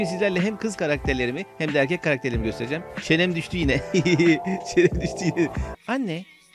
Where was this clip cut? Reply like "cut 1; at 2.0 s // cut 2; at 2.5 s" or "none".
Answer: cut 1; at 5.6 s